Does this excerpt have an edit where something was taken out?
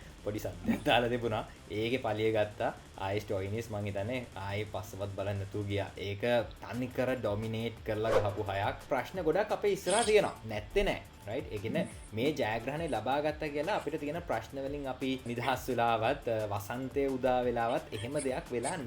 yes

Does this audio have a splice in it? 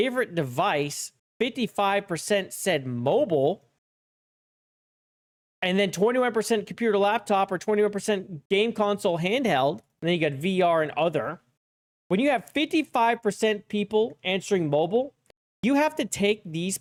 no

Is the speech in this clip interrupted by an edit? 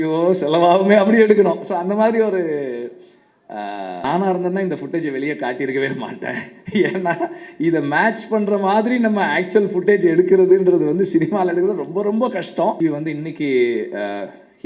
yes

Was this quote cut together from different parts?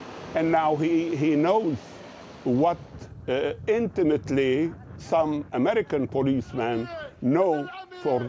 no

